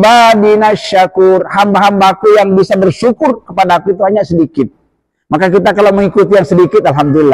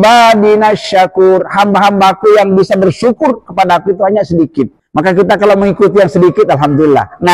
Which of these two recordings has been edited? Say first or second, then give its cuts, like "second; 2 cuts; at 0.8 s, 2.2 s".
second; 1 cut; at 4.8 s